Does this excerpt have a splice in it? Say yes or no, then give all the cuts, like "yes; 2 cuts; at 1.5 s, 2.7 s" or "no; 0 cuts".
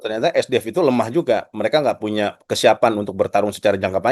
no; 0 cuts